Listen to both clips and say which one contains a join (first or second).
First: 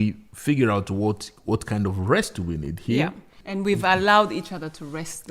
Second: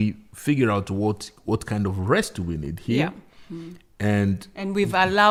first